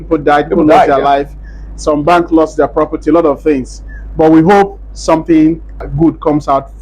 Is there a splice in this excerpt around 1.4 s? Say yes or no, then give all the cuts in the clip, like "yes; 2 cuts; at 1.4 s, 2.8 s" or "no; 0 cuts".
no; 1 cut; at 5.8 s